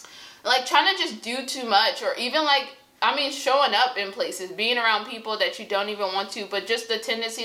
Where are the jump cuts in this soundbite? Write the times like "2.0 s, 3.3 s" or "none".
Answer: none